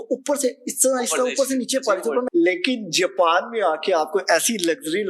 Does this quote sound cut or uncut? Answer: cut